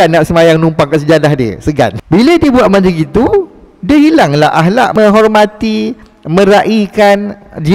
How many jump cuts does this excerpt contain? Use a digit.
2